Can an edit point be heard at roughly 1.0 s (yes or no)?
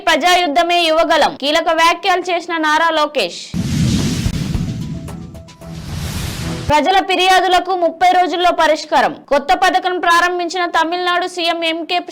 no